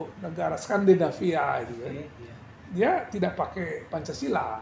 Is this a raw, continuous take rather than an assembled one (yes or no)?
yes